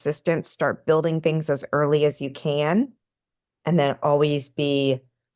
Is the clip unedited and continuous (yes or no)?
yes